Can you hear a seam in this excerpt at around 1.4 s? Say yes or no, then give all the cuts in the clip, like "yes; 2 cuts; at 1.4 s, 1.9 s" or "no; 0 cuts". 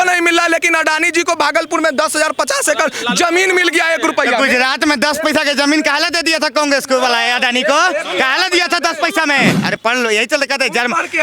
no; 1 cut; at 9.6 s